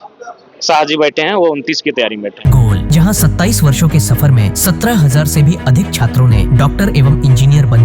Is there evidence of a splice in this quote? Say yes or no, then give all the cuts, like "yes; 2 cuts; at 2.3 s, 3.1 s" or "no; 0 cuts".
no; 0 cuts